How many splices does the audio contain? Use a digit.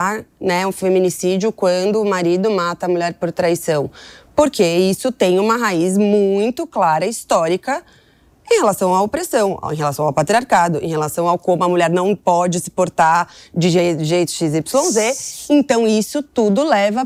0